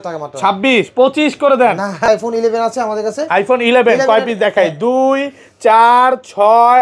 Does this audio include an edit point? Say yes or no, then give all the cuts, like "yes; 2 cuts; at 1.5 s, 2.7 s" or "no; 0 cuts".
yes; 1 cut; at 2.1 s